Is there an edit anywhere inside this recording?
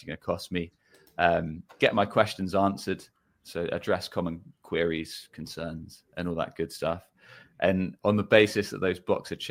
no; 0 cuts

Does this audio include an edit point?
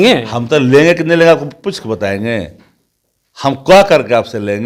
no; 0 cuts

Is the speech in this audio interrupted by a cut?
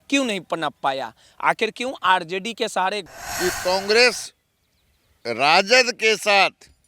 yes; 1 cut; at 3.0 s

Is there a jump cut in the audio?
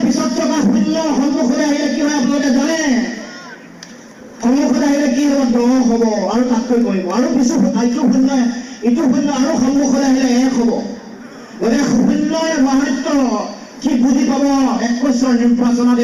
no; 0 cuts

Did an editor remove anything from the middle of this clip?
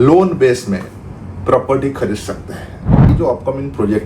yes; 1 cut; at 3.1 s

